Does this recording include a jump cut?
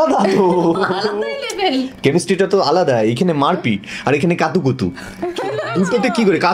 no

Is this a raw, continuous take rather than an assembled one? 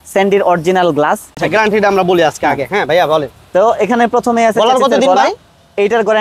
no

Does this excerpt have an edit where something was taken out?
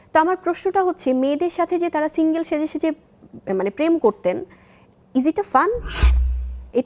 no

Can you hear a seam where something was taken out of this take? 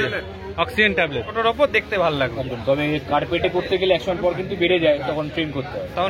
yes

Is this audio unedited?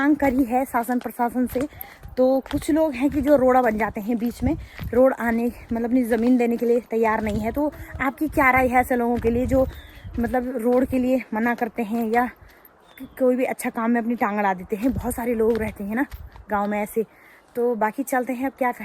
yes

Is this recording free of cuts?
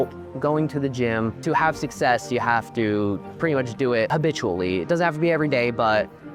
no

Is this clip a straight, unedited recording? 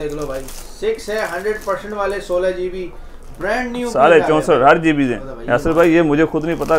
no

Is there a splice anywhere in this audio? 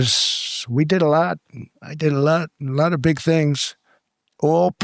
no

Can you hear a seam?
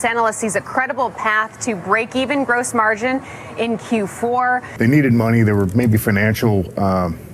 yes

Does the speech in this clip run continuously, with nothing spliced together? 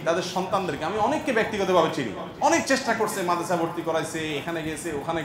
yes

